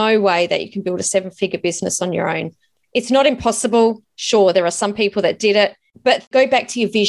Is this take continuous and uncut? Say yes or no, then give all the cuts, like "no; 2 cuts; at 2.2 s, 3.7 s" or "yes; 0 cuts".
no; 1 cut; at 6.2 s